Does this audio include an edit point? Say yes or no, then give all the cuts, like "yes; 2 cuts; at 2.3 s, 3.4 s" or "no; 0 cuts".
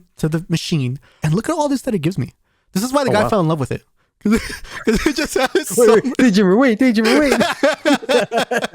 yes; 1 cut; at 1.2 s